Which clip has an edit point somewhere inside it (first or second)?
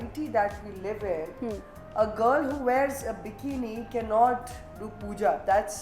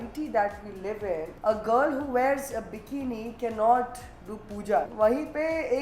second